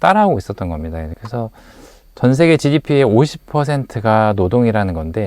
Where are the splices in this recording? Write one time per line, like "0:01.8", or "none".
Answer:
0:01.1